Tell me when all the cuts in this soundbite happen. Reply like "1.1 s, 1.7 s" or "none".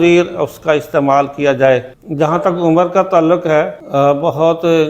1.9 s, 3.8 s